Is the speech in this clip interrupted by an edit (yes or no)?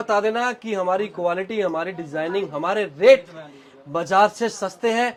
no